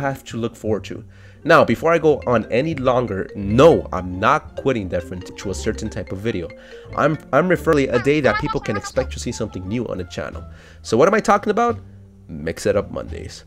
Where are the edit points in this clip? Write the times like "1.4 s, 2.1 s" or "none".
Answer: 5.3 s, 7.7 s